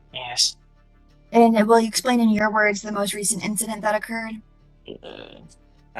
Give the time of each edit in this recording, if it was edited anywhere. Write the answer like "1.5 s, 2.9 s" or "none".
4.6 s